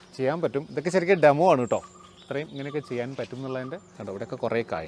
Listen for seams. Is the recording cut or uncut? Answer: cut